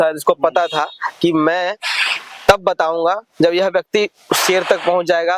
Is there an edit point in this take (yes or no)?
no